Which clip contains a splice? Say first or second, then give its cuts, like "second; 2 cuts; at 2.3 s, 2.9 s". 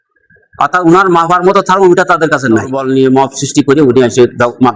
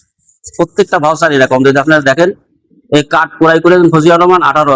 first; 1 cut; at 2.8 s